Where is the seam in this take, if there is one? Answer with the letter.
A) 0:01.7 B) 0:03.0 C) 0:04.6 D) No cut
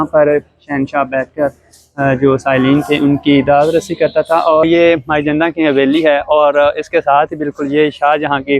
C